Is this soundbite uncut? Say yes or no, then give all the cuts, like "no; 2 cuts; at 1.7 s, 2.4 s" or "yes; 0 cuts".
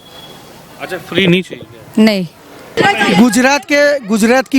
no; 1 cut; at 2.8 s